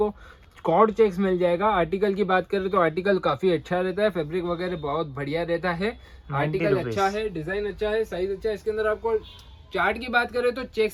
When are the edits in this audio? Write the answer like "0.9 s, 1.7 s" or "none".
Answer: none